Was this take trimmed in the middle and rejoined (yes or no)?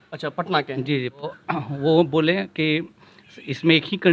yes